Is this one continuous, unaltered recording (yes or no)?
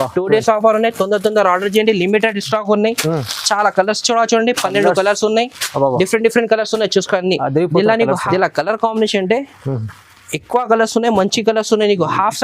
no